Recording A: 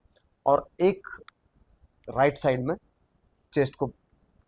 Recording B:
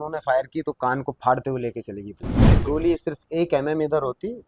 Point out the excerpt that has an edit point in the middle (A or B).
B